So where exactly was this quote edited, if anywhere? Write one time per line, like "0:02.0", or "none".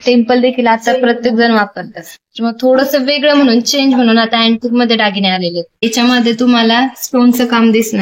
0:05.9